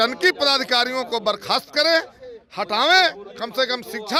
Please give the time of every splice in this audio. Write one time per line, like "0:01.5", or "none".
none